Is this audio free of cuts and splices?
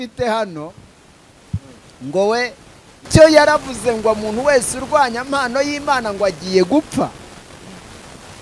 no; 1 cut; at 3.1 s

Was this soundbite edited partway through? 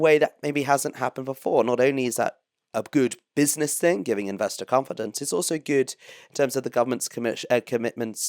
no; 0 cuts

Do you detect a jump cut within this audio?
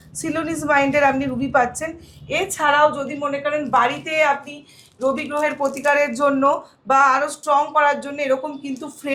no; 0 cuts

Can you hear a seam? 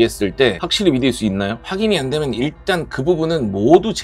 yes; 1 cut; at 1.6 s

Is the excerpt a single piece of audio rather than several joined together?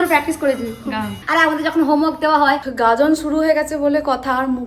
no; 2 cuts; at 1.2 s, 2.6 s

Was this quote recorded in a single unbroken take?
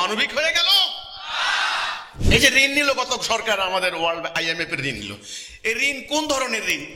no; 1 cut; at 2.1 s

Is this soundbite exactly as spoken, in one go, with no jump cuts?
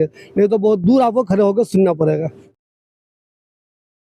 yes; 0 cuts

